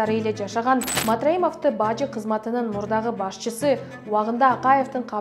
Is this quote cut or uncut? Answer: cut